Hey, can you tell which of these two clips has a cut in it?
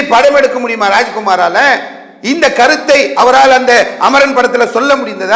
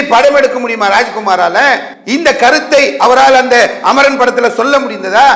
second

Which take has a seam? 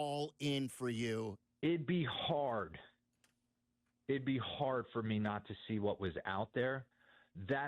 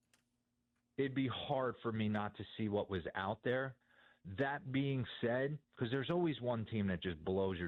first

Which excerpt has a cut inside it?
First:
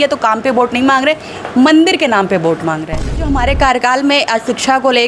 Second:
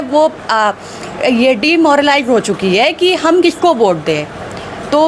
first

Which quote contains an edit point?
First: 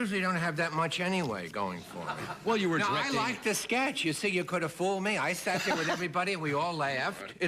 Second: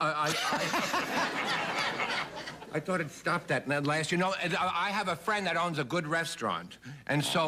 first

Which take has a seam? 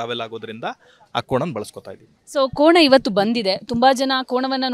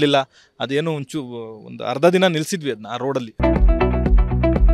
second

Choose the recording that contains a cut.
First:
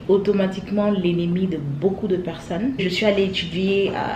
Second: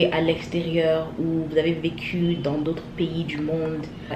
first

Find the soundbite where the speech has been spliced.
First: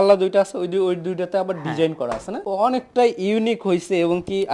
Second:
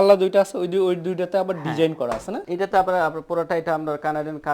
first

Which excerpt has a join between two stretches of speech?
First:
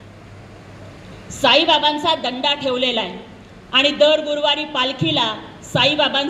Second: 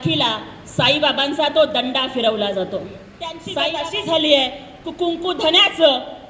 second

